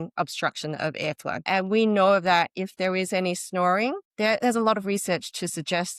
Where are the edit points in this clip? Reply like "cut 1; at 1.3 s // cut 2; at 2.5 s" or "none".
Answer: cut 1; at 1.4 s